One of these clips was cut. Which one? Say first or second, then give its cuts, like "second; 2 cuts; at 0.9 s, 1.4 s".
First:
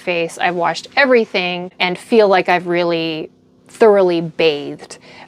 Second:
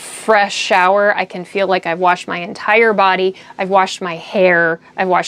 first; 1 cut; at 1.8 s